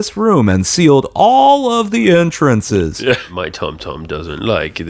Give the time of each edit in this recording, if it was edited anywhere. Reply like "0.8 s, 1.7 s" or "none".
3.3 s